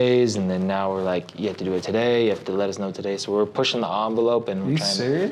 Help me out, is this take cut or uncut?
uncut